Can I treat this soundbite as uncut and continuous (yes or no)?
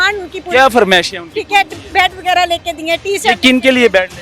yes